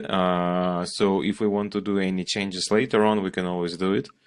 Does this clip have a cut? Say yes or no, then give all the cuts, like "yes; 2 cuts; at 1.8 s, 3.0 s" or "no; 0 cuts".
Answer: no; 0 cuts